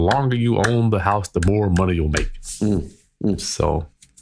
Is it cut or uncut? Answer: uncut